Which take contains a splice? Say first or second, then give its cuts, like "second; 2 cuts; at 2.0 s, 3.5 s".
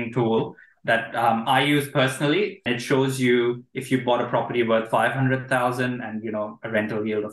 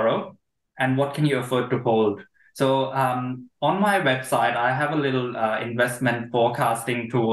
first; 1 cut; at 2.6 s